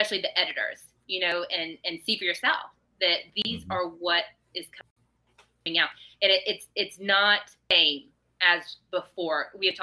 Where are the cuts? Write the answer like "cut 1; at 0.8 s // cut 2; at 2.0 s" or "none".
none